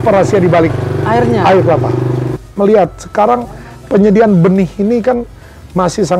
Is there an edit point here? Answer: yes; 1 cut; at 2.4 s

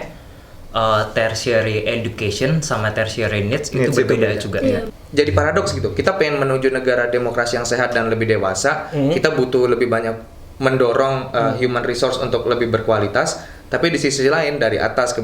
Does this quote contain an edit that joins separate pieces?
yes; 1 cut; at 4.9 s

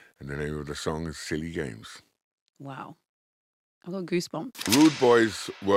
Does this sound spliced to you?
yes; 1 cut; at 4.6 s

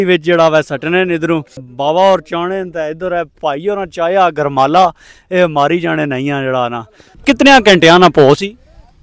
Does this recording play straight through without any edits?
no; 2 cuts; at 1.6 s, 7.2 s

